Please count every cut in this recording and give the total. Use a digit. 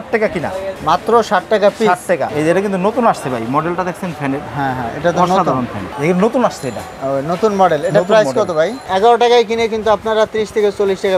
3